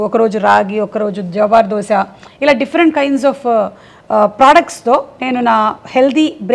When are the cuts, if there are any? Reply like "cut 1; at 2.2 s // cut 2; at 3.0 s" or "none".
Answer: none